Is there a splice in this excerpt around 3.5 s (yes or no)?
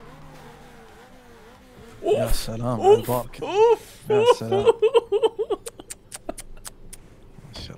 no